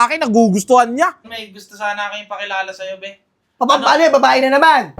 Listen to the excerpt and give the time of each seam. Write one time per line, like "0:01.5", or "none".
0:01.2